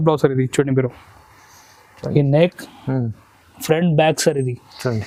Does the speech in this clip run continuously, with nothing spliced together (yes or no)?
yes